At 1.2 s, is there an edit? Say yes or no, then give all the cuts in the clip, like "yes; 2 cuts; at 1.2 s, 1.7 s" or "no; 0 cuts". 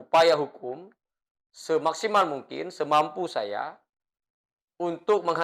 no; 0 cuts